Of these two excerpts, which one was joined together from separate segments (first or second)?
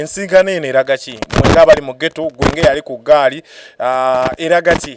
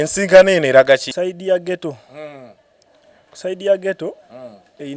second